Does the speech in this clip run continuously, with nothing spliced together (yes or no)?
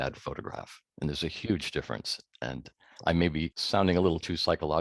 no